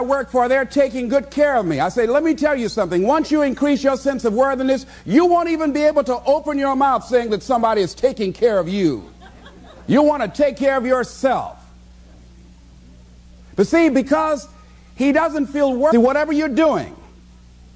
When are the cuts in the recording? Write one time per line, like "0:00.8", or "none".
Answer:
none